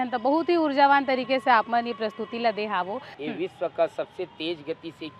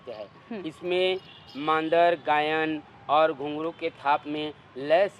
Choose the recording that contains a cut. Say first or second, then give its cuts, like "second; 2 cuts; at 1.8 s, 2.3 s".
first; 1 cut; at 3.1 s